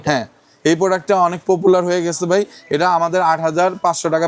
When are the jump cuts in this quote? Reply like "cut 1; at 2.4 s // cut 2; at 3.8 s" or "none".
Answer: none